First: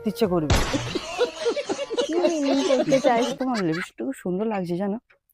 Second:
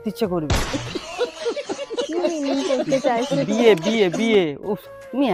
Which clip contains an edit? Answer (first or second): first